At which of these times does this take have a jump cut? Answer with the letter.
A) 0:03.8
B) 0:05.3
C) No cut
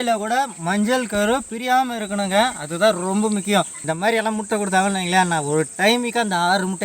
A